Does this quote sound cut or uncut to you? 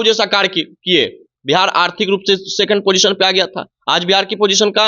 uncut